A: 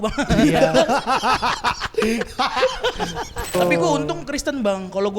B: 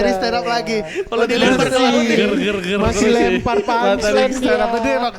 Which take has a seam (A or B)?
A